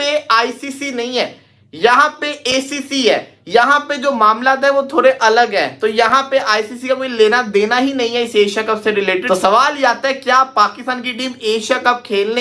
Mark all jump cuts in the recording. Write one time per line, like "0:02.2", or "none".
0:09.2